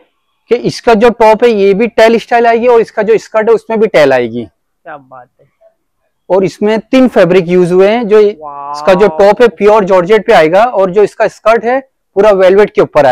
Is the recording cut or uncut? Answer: uncut